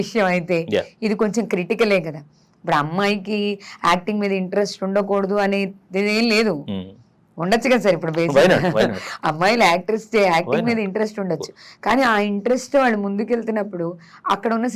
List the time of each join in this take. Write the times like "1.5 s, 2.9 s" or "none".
none